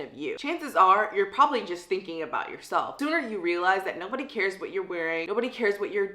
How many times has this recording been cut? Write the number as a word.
two